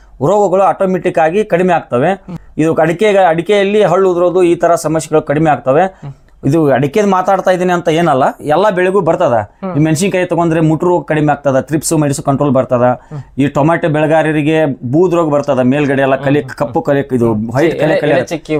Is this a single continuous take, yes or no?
yes